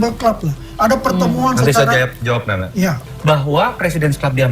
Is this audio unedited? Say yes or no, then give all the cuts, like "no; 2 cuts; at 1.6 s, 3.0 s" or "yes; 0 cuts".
no; 1 cut; at 3.1 s